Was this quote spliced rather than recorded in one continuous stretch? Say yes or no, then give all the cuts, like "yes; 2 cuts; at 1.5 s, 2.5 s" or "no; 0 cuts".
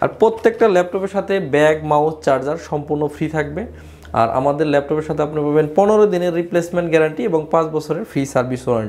no; 0 cuts